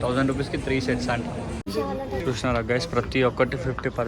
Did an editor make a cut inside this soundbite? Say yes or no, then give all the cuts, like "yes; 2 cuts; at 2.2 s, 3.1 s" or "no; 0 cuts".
yes; 1 cut; at 1.7 s